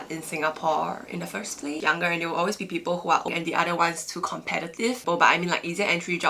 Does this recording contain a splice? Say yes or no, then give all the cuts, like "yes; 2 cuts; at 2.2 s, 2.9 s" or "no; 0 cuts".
yes; 3 cuts; at 1.8 s, 3.3 s, 5.0 s